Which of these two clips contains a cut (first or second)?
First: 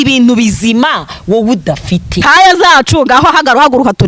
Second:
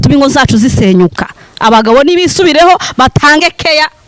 first